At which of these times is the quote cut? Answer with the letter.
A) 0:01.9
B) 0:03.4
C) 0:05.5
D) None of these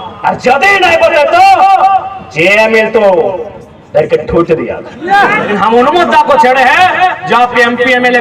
C